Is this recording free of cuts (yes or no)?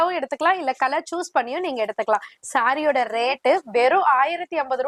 yes